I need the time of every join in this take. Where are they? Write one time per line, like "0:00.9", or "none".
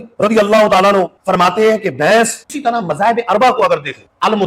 0:02.4